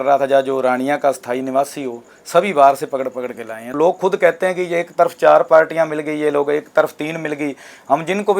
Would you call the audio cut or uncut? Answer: cut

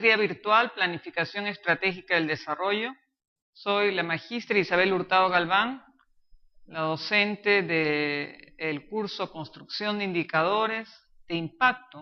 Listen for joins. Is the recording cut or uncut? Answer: uncut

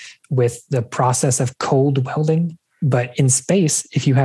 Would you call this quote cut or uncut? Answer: cut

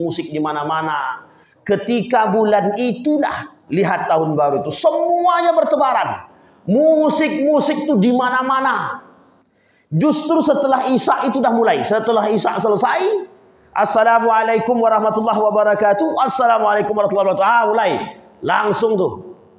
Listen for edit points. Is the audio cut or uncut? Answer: uncut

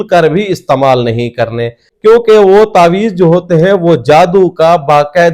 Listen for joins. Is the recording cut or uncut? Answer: cut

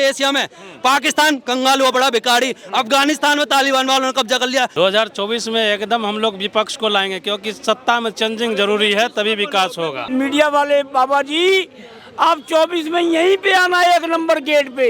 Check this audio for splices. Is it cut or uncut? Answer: cut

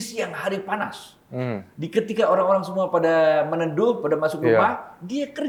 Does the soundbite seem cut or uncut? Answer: uncut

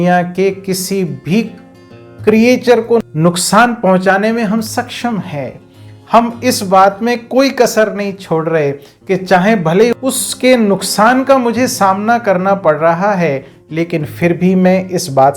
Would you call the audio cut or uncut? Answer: uncut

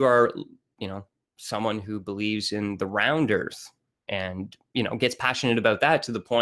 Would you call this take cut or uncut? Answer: cut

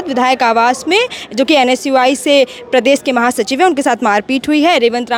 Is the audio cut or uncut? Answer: uncut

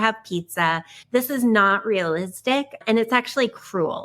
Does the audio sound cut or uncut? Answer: cut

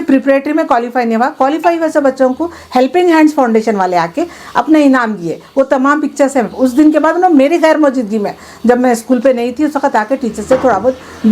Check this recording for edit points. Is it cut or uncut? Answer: uncut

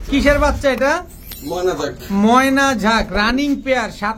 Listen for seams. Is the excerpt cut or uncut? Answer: uncut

